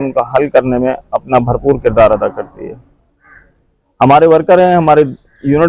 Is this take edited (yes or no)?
no